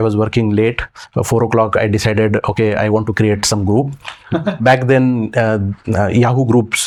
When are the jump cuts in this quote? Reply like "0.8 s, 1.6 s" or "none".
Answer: none